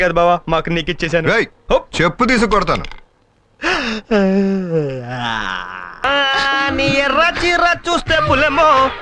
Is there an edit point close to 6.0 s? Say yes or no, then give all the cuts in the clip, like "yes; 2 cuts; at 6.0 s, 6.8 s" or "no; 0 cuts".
yes; 1 cut; at 6.0 s